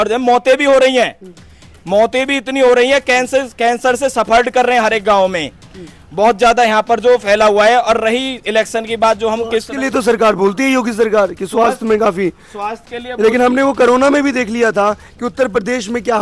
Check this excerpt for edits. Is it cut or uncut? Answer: uncut